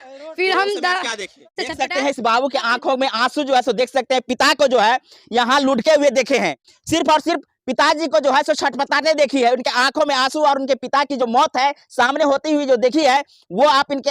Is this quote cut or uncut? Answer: cut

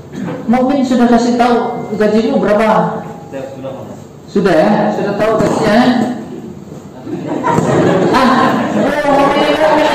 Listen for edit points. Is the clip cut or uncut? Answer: uncut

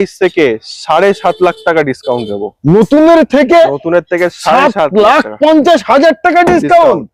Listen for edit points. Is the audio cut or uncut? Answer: uncut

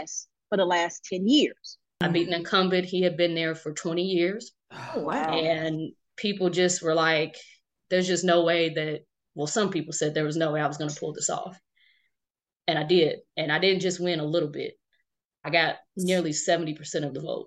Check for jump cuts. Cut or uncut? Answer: cut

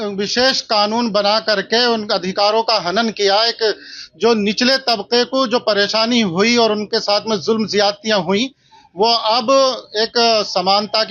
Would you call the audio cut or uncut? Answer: uncut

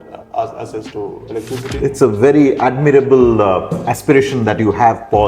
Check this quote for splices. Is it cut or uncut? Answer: cut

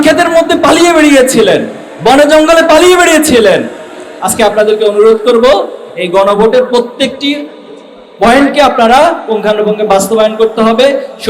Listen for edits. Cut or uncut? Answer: uncut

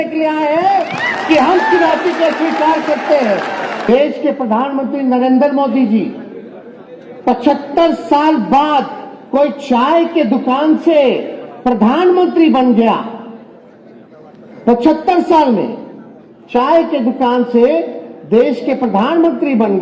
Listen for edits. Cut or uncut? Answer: cut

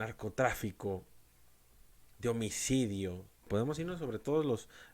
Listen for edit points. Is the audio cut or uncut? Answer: cut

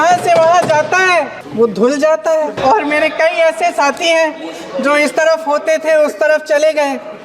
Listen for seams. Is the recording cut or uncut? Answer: cut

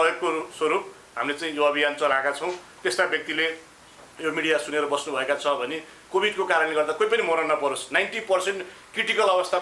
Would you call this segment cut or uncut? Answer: uncut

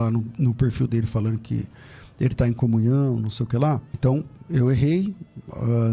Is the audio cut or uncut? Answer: cut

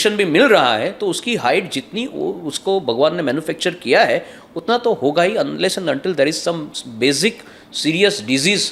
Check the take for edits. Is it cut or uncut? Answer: uncut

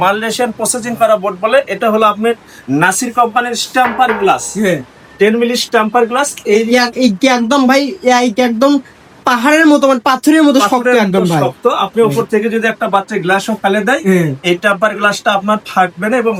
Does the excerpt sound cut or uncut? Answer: uncut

